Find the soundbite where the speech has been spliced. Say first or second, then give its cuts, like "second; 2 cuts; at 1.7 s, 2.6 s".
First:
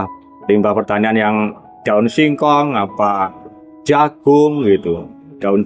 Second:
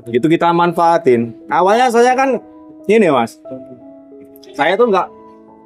second; 1 cut; at 1.4 s